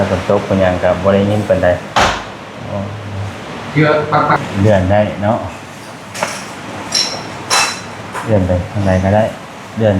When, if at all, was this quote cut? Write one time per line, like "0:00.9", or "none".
0:04.4